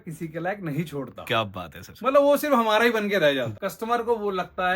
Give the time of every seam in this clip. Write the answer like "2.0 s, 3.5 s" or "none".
3.5 s